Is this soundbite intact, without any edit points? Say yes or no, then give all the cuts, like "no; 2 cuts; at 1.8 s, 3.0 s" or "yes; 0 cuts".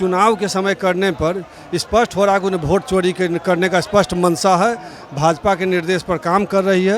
yes; 0 cuts